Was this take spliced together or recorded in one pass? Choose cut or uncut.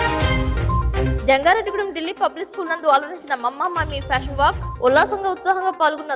uncut